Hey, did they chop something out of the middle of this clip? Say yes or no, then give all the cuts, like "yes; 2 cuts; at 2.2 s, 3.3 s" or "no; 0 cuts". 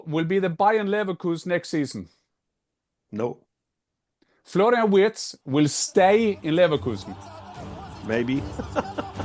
no; 0 cuts